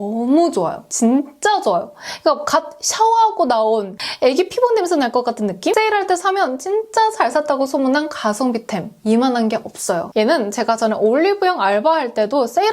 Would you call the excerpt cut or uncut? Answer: cut